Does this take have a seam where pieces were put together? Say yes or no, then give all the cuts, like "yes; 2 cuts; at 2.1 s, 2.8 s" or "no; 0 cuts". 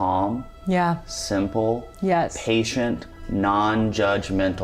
no; 0 cuts